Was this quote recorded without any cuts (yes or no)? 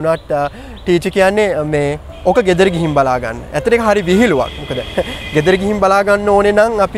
yes